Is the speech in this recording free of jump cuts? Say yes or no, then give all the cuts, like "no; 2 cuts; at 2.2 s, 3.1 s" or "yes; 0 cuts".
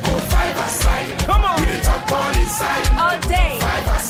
yes; 0 cuts